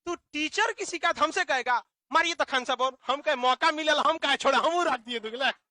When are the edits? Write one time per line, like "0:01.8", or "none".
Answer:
none

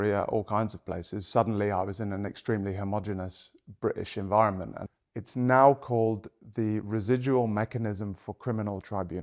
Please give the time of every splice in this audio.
0:04.8

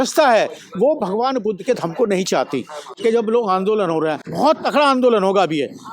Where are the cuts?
0:02.9
0:04.2

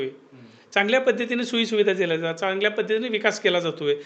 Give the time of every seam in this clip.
none

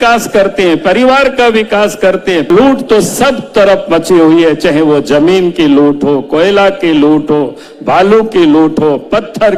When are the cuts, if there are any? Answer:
0:02.5

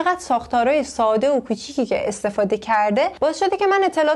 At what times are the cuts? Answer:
none

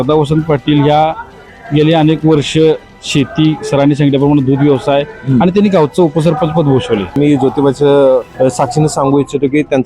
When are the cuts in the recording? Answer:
0:07.2
0:08.3

